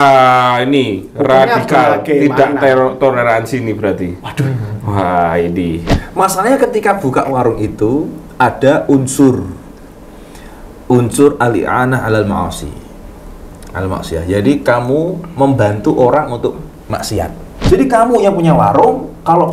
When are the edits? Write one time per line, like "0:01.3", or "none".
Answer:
0:05.9
0:17.5